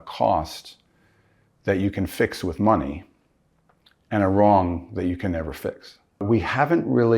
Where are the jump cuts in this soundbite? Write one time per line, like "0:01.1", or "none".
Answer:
0:06.2